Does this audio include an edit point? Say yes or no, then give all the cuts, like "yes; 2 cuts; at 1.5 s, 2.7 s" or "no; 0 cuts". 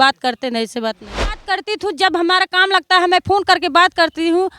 yes; 1 cut; at 1.4 s